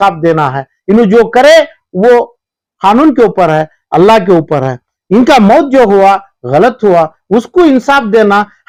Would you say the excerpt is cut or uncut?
uncut